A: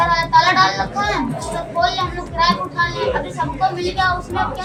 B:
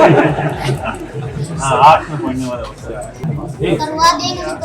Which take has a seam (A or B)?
B